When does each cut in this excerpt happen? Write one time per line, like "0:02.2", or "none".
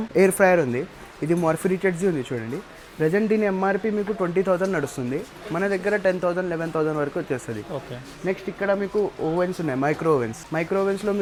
none